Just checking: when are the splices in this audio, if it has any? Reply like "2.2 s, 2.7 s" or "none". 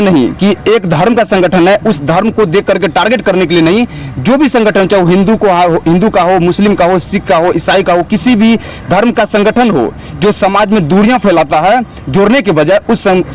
none